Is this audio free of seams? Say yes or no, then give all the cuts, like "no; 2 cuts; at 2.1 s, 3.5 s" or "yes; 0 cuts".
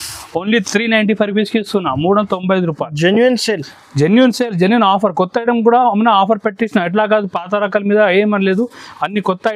yes; 0 cuts